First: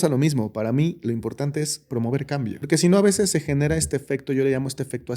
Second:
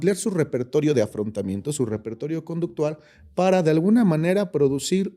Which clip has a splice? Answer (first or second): first